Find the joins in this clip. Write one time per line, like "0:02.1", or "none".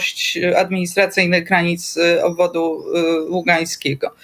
none